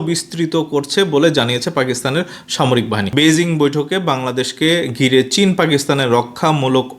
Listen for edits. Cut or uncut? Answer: cut